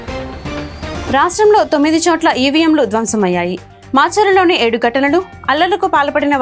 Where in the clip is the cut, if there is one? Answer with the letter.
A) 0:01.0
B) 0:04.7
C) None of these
A